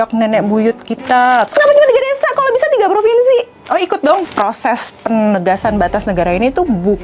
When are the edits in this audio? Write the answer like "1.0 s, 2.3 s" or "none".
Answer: 1.5 s, 4.3 s